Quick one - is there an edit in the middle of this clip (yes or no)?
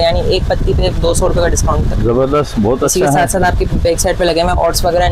no